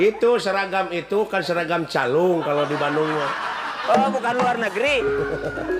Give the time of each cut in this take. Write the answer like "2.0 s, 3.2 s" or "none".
none